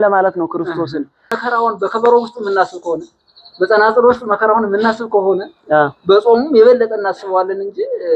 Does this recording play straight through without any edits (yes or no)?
no